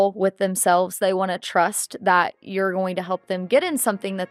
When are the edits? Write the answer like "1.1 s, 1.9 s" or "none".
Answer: none